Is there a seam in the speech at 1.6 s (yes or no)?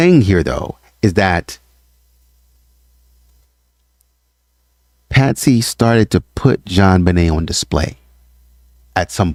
no